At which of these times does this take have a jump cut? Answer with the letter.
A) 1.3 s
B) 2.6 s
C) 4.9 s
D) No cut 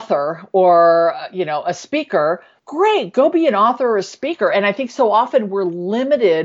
B